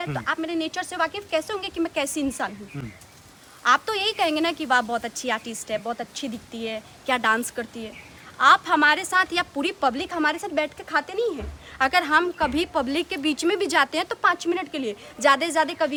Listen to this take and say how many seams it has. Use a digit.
0